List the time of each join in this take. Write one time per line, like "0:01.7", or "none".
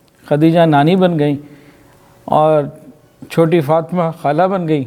none